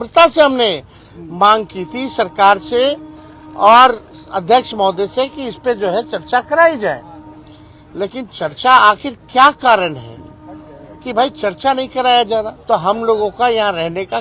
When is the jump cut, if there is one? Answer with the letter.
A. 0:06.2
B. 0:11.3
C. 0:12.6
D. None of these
C